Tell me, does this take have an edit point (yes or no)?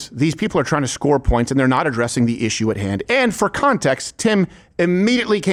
no